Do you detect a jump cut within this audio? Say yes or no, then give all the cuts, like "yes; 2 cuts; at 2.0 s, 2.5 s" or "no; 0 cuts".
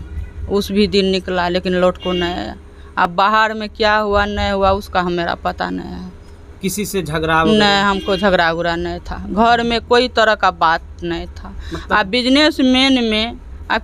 no; 0 cuts